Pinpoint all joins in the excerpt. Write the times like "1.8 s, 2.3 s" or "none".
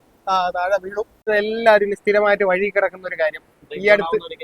1.3 s